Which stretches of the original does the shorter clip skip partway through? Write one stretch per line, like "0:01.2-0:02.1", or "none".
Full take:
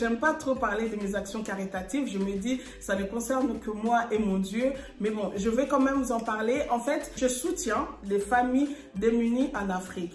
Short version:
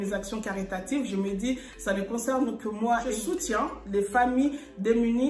0:04.1-0:07.3